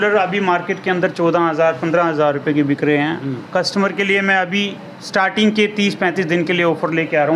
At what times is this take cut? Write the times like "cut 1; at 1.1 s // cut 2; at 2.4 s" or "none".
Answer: none